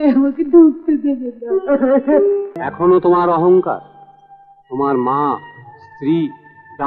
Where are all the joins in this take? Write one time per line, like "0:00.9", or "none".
0:02.6